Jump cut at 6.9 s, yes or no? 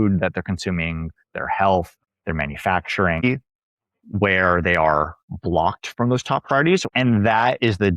yes